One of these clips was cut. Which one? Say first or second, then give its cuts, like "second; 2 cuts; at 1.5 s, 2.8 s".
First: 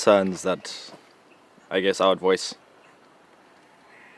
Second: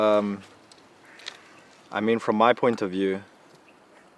first; 1 cut; at 1.6 s